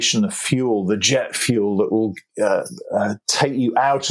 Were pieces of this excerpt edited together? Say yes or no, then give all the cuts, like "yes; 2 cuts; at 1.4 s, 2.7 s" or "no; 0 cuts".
no; 0 cuts